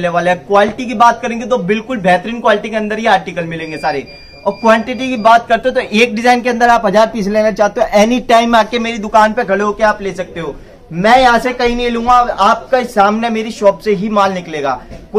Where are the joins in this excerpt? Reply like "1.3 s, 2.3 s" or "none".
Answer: none